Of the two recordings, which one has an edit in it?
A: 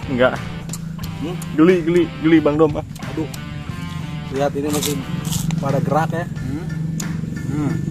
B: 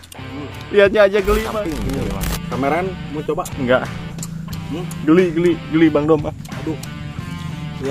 B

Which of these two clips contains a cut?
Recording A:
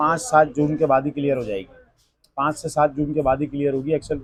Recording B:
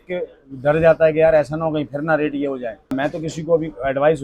B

